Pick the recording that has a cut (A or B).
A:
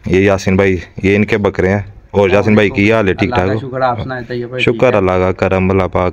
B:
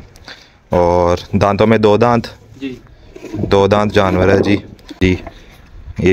B